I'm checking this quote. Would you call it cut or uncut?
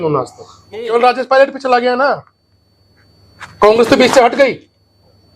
cut